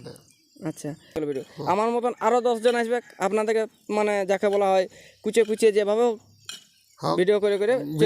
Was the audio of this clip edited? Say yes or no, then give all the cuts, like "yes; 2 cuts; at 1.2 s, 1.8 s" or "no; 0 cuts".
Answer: yes; 1 cut; at 1.1 s